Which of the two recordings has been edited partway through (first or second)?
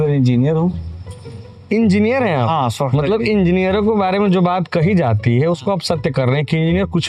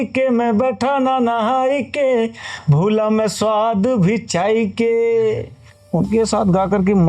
second